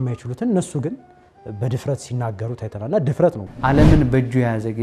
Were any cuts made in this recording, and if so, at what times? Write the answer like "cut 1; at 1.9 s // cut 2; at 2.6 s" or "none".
cut 1; at 3.5 s